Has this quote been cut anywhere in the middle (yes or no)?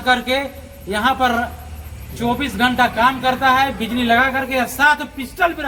no